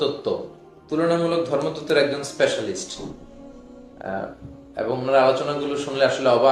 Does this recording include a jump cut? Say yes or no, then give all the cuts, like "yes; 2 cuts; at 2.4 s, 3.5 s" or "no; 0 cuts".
no; 0 cuts